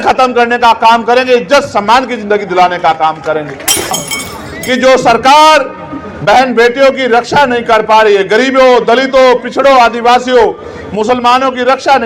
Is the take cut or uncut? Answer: cut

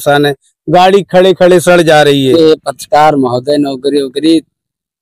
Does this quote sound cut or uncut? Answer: cut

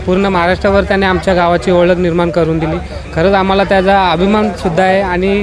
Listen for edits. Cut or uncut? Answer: uncut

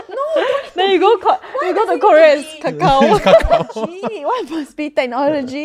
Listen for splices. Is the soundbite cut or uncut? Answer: uncut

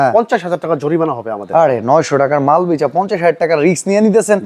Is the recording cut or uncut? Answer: uncut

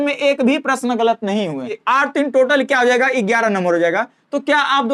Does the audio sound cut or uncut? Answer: cut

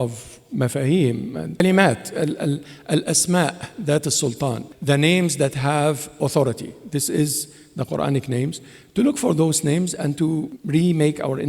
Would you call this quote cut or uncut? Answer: cut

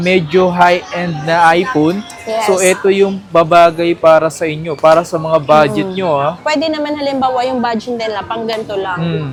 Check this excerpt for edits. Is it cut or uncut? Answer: uncut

